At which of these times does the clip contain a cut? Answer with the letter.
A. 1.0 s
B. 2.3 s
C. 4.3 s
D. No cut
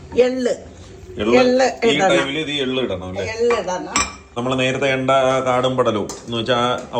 C